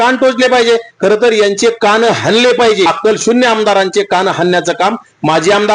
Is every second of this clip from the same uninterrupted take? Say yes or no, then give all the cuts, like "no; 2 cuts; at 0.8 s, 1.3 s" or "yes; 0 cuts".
no; 1 cut; at 2.9 s